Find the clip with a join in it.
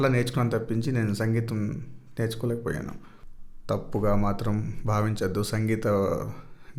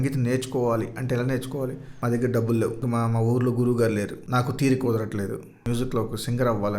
second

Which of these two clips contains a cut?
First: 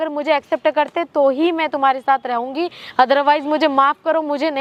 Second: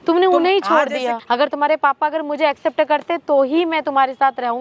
second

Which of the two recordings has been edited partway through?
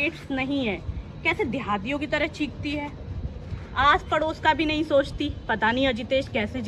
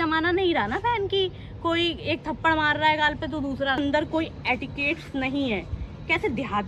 second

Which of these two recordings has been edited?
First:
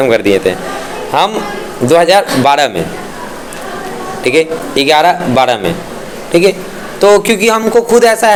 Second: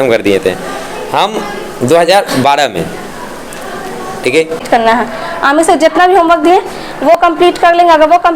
second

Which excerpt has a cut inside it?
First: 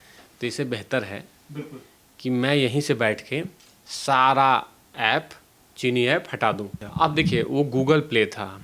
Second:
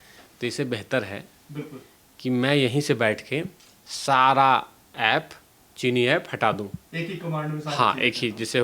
first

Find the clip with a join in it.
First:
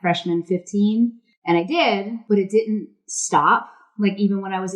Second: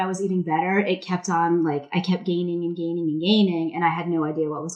first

